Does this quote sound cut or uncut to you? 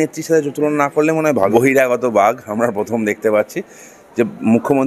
cut